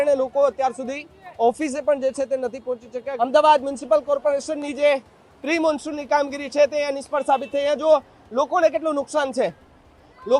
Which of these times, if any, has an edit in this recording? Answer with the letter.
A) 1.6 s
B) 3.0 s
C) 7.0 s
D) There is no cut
B